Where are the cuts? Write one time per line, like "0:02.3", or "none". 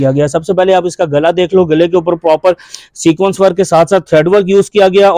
none